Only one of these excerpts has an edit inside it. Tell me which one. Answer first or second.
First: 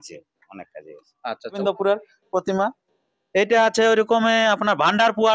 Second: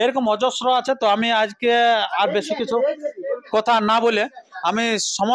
first